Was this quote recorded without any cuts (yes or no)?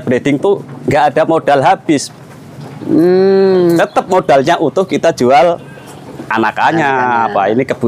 yes